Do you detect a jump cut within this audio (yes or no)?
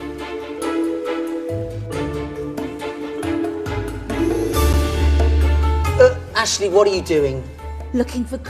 yes